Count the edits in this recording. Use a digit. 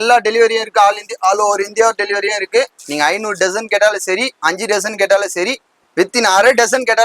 1